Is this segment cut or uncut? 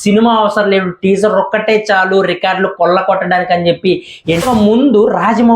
cut